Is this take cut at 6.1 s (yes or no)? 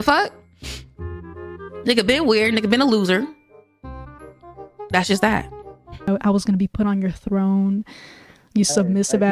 yes